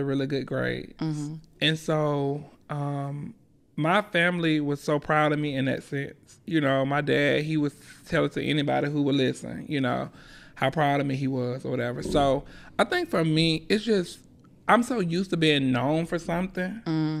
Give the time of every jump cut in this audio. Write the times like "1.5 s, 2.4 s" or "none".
none